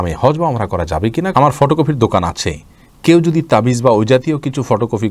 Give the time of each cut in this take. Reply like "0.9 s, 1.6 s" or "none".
1.3 s